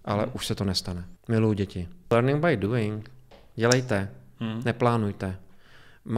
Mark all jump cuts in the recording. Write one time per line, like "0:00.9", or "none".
0:01.1
0:02.1